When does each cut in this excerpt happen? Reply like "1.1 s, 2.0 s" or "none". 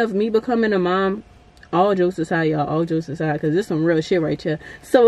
none